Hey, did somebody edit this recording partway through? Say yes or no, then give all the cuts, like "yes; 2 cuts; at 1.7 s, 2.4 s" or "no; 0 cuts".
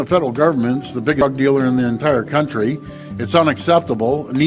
yes; 1 cut; at 1.3 s